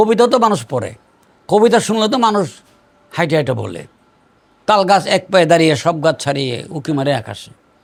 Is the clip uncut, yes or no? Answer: yes